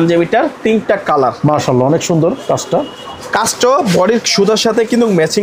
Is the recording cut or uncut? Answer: uncut